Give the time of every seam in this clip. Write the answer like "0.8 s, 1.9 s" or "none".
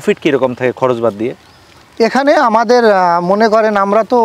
none